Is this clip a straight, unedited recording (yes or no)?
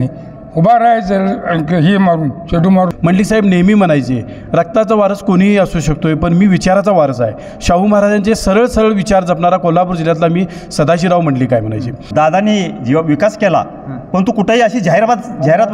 no